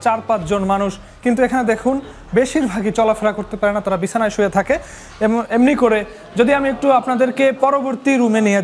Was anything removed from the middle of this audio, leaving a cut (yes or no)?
no